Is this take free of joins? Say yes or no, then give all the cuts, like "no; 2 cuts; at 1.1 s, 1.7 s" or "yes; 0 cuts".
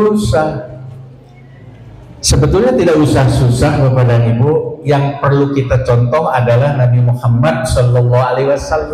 yes; 0 cuts